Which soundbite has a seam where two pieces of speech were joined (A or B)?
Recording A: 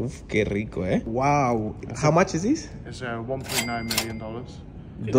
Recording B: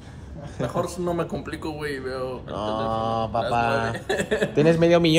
A